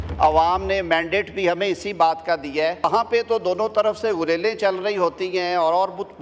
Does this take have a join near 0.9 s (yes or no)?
no